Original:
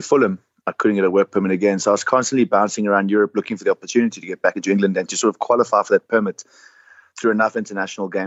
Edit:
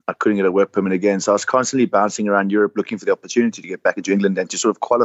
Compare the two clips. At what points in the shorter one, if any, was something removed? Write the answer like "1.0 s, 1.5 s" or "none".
none